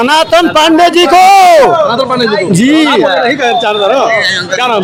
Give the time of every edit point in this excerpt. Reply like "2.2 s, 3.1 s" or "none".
none